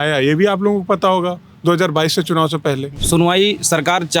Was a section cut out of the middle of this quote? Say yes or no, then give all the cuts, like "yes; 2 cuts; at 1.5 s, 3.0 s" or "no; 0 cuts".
yes; 1 cut; at 2.9 s